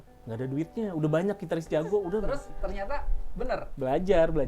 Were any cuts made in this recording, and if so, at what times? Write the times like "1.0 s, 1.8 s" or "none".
2.3 s